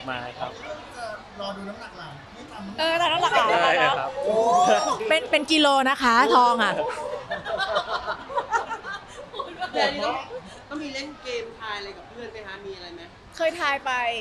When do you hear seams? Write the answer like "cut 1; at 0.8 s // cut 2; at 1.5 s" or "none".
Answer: none

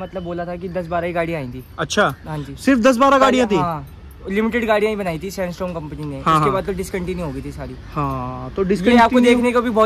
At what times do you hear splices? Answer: none

